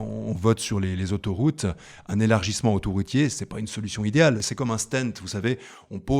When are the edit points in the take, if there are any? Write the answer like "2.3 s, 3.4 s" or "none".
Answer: 4.4 s